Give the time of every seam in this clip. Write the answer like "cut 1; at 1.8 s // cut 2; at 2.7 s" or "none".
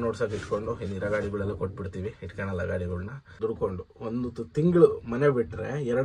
cut 1; at 3.2 s